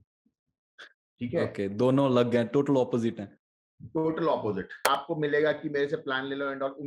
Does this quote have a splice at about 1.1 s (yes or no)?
no